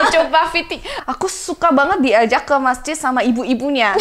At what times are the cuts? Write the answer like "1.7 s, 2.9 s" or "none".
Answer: 1.0 s